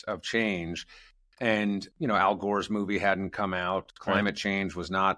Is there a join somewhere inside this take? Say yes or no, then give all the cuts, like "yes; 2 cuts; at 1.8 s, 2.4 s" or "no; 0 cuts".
yes; 1 cut; at 1.9 s